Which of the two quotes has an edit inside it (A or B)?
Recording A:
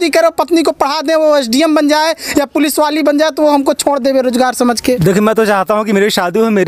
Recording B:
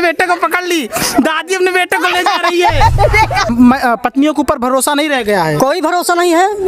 B